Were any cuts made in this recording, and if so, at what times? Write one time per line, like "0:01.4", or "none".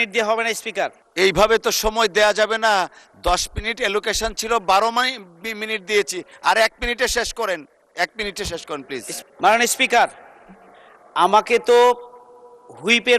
0:01.0
0:09.1